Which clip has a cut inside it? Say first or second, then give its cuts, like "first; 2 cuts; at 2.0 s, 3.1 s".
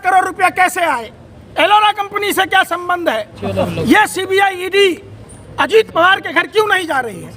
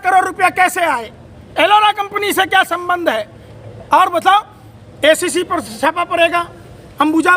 first; 1 cut; at 3.4 s